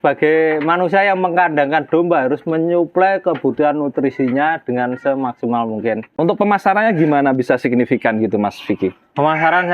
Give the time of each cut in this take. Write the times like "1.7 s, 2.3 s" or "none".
6.1 s